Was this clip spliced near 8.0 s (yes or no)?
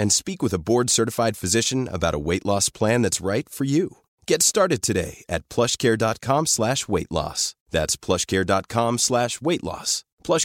no